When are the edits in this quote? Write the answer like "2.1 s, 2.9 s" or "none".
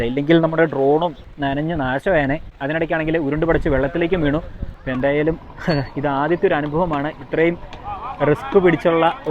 1.2 s, 2.5 s, 4.6 s